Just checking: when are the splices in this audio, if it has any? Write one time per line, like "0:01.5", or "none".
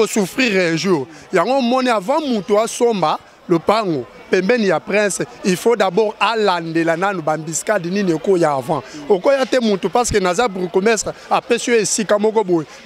none